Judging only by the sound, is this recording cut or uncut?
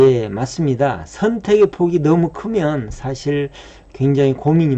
uncut